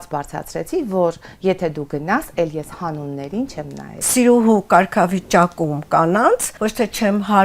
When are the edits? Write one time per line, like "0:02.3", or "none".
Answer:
0:04.1
0:06.5